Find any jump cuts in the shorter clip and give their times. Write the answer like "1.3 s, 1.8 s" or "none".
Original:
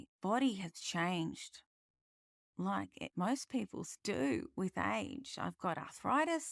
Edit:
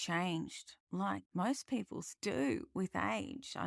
1.2 s